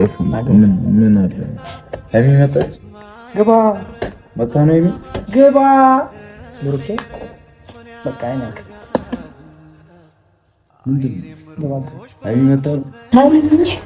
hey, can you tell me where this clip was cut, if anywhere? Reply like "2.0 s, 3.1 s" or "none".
12.9 s